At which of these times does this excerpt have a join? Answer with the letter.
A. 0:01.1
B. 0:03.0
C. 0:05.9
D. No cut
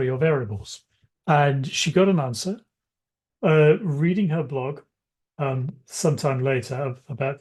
D